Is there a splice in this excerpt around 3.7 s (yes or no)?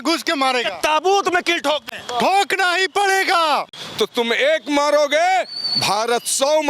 yes